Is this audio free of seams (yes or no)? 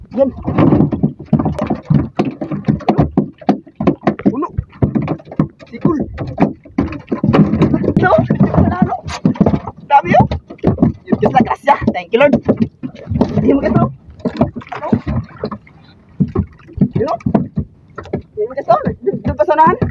no